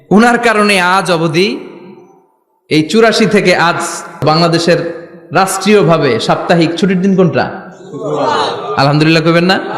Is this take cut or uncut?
cut